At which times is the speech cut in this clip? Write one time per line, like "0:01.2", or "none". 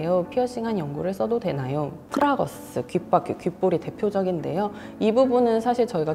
0:02.0